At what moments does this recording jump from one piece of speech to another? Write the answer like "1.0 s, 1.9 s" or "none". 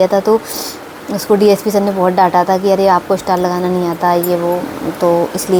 none